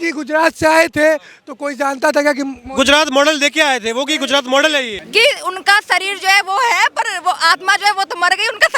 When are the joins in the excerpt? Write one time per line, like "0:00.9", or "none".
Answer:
0:05.0